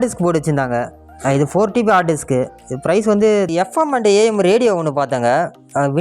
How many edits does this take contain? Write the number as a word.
one